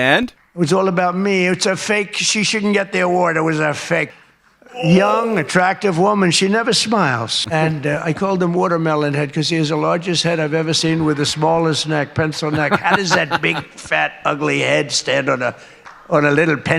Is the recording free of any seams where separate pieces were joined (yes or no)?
no